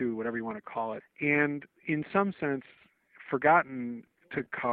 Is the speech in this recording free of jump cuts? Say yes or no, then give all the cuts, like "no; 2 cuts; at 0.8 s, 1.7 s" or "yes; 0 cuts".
no; 2 cuts; at 1.0 s, 1.7 s